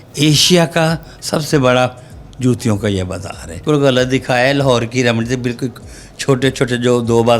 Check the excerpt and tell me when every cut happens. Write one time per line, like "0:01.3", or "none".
0:03.6